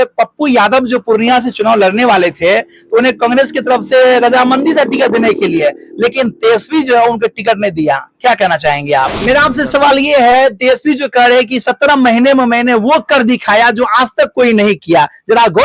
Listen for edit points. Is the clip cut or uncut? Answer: cut